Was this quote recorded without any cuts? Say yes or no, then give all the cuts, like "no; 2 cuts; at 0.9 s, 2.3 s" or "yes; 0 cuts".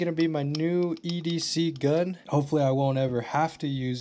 no; 1 cut; at 2.2 s